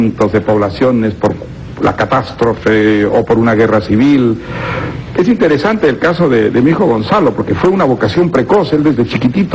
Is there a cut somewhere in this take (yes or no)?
no